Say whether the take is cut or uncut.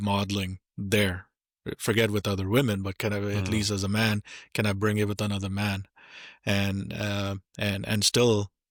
uncut